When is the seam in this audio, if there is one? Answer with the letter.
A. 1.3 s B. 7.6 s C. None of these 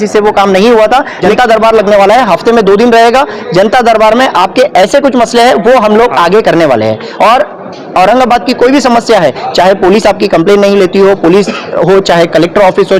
A